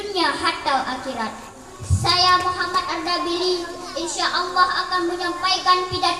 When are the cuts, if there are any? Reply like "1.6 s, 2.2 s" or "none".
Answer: 2.0 s